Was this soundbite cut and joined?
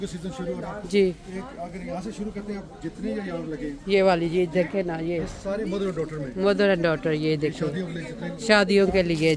no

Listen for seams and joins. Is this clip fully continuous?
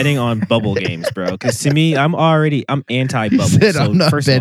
no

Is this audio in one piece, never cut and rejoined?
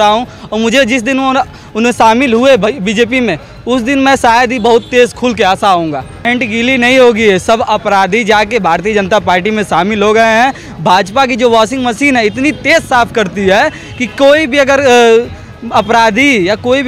no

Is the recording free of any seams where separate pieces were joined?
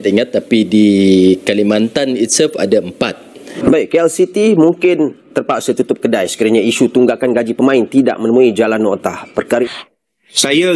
no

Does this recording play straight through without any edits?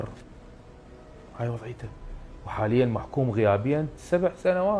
yes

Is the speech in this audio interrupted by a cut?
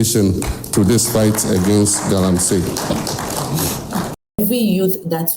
yes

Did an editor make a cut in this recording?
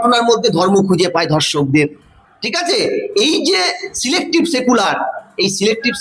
no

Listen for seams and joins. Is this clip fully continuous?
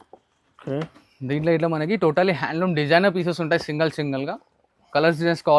yes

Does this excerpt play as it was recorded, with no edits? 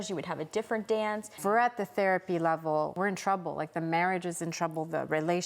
no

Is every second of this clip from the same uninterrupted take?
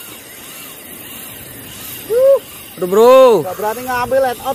no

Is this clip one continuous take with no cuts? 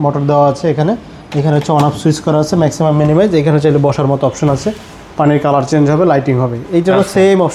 yes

